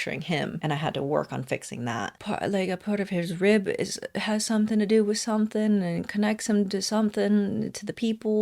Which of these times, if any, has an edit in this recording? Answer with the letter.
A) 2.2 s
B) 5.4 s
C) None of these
A